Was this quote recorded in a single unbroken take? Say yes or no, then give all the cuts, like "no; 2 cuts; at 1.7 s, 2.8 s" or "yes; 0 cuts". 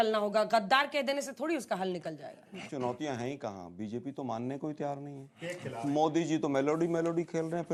yes; 0 cuts